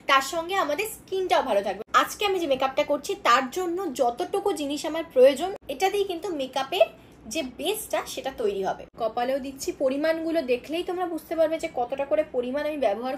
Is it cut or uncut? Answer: cut